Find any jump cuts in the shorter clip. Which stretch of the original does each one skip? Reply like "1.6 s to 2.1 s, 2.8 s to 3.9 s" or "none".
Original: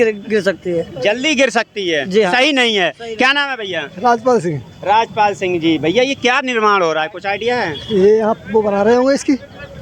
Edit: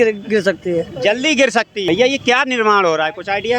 1.8 s to 5.8 s